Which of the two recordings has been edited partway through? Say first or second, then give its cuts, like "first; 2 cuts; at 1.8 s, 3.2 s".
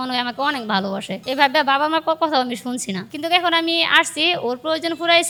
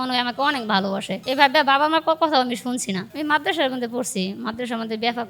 second; 1 cut; at 3.1 s